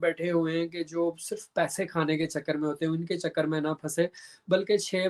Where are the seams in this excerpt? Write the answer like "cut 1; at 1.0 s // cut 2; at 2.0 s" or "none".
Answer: none